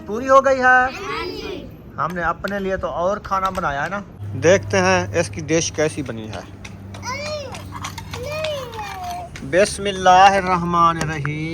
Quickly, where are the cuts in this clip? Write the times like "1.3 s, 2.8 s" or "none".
4.2 s